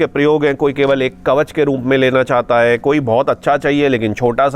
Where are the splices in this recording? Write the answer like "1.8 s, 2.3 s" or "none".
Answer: none